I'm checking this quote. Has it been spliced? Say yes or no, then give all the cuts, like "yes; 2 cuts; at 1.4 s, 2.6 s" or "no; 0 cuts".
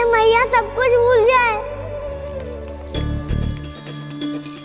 yes; 1 cut; at 1.6 s